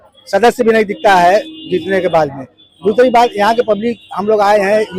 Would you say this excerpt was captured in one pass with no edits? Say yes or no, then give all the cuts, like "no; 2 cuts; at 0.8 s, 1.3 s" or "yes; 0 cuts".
yes; 0 cuts